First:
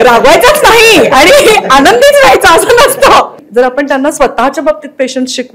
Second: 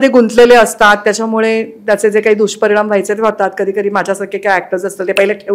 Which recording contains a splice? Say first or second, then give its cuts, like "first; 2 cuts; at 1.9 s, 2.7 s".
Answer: first; 1 cut; at 3.4 s